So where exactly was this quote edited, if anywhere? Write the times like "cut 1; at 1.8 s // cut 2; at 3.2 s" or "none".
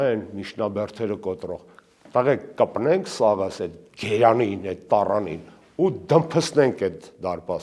none